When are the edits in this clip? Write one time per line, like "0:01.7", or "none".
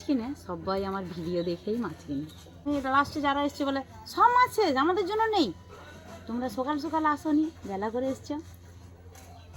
0:02.6